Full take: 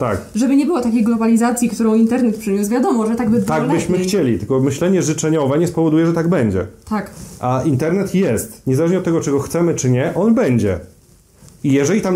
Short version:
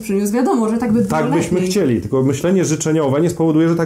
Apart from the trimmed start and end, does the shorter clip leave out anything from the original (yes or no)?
no